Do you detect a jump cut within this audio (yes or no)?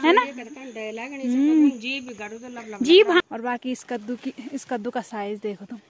yes